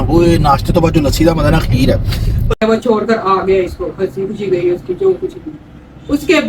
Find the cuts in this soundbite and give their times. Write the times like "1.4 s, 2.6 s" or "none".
2.6 s